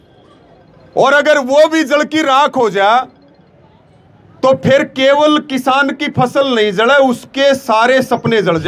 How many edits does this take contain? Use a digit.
0